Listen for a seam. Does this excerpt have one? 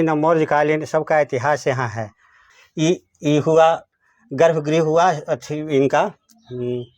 yes; 1 cut; at 2.5 s

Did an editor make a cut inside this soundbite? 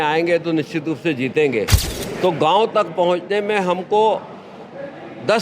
yes; 1 cut; at 1.8 s

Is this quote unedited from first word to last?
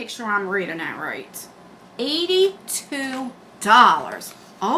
yes; 0 cuts

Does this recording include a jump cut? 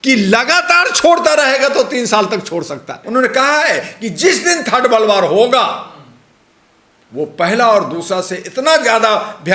yes; 1 cut; at 3.0 s

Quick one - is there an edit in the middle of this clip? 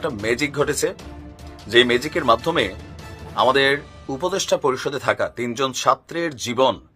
no; 0 cuts

